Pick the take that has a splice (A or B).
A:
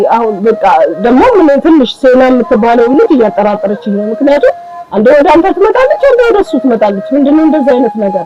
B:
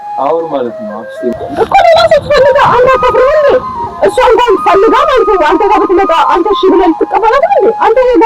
B